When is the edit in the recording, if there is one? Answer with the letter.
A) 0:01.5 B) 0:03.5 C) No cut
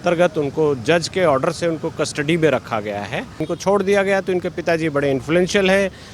B